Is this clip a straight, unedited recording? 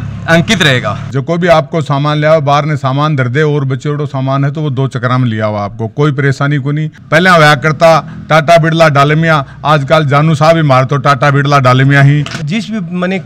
no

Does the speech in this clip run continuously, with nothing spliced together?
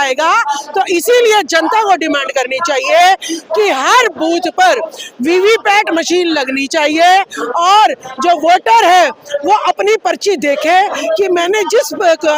yes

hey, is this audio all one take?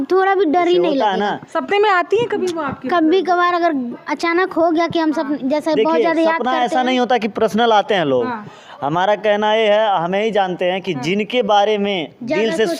yes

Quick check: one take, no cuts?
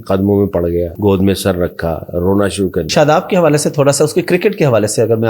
no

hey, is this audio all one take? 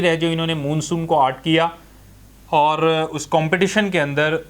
yes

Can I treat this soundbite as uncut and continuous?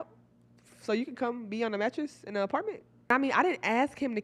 no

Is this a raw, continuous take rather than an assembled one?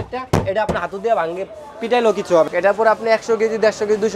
no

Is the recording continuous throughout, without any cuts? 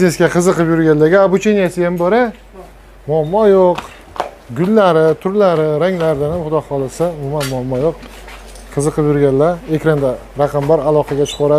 yes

